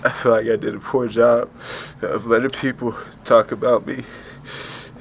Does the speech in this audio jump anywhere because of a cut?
no; 0 cuts

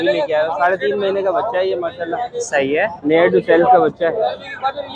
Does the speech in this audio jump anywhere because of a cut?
no; 0 cuts

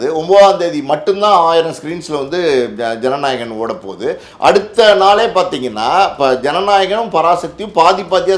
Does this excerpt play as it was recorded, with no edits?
yes; 0 cuts

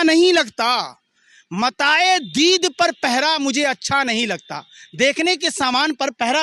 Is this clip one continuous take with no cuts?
yes; 0 cuts

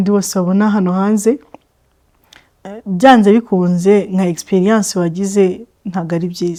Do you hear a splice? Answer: no; 0 cuts

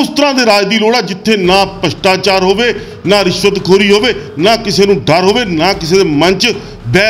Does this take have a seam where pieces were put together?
no; 0 cuts

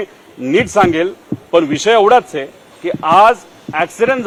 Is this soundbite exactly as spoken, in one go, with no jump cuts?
yes; 0 cuts

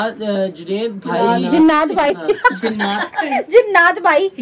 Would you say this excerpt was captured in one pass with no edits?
no; 1 cut; at 2.1 s

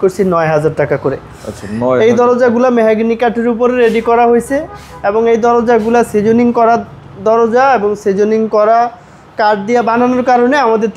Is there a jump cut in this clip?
no; 0 cuts

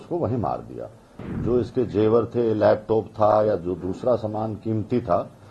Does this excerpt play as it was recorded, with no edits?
no; 1 cut; at 1.3 s

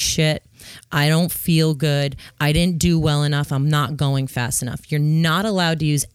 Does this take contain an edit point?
no; 0 cuts

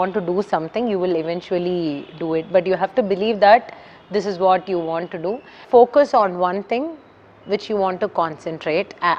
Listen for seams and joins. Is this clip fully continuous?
no; 1 cut; at 5.6 s

